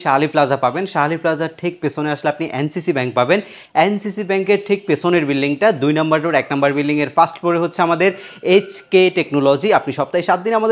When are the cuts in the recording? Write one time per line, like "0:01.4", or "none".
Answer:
none